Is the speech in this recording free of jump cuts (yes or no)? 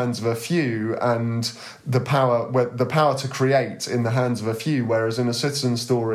yes